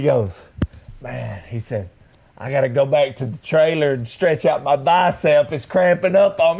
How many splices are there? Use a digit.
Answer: 0